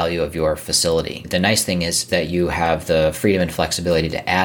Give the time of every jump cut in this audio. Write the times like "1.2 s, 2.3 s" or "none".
1.2 s